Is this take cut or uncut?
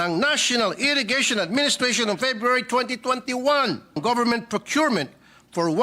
cut